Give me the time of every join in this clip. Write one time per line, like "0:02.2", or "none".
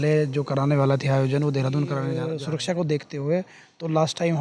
0:02.3